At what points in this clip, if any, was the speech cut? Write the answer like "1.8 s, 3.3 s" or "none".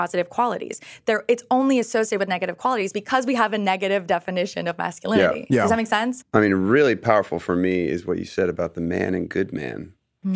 none